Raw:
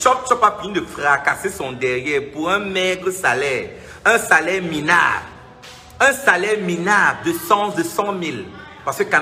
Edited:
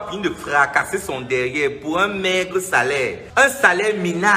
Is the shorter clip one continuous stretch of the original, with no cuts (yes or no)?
no